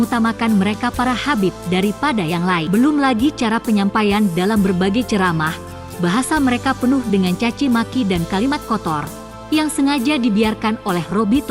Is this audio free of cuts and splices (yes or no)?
no